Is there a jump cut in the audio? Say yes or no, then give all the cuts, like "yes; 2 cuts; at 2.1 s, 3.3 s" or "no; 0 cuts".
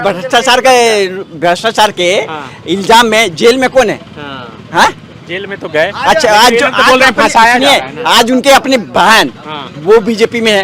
no; 0 cuts